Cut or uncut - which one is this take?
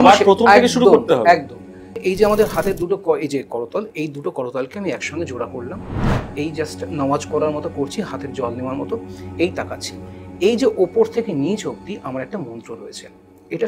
cut